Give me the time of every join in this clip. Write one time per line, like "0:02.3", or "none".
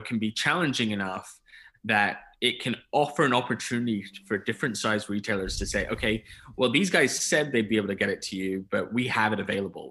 none